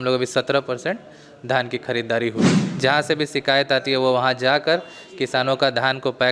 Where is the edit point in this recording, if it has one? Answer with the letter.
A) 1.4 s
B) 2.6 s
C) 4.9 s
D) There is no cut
B